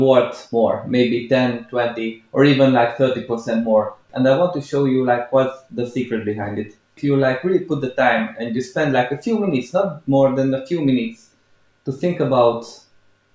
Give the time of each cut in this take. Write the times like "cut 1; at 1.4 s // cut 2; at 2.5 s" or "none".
cut 1; at 4.1 s // cut 2; at 6.9 s